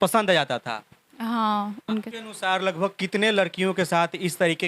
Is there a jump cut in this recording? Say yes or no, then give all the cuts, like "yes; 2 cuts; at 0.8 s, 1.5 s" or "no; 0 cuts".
yes; 1 cut; at 2.1 s